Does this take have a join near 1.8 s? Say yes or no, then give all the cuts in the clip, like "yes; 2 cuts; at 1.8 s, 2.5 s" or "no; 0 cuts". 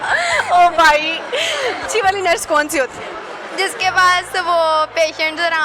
yes; 1 cut; at 1.8 s